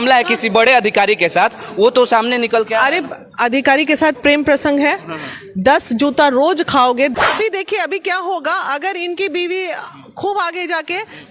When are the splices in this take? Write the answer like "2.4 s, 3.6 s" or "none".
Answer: 7.1 s